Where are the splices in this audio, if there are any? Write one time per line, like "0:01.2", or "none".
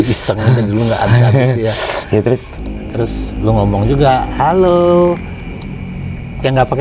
0:02.5